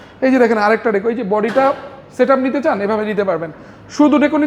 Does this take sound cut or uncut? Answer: uncut